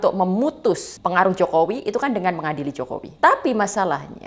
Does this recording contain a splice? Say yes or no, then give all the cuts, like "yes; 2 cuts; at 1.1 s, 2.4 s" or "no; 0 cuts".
yes; 2 cuts; at 0.9 s, 3.1 s